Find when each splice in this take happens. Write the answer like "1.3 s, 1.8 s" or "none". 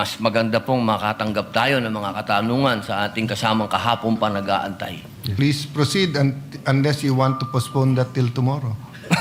5.2 s

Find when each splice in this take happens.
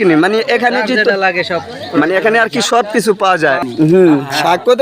3.6 s

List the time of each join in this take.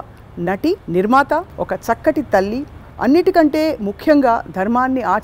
0.8 s, 1.5 s

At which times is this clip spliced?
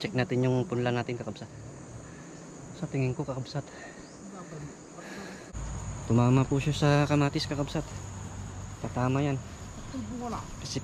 1.6 s, 5.5 s

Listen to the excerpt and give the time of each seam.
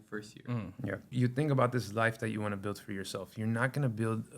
1.1 s

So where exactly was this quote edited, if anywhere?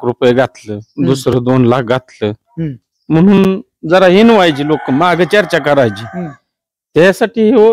none

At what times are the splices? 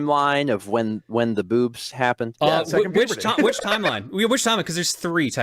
2.3 s

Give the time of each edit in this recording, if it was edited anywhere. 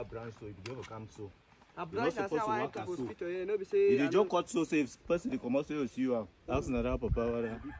6.4 s

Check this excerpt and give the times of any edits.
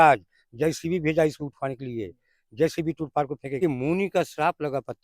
3.4 s

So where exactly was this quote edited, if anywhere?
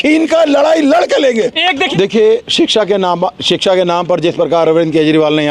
1.8 s

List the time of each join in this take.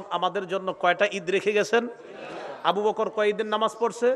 none

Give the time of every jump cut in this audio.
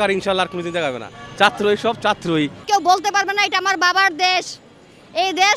2.6 s

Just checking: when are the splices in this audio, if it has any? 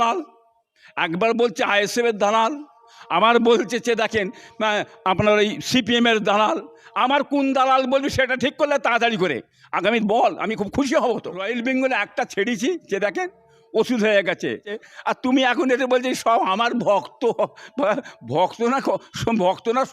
11.5 s, 14.7 s

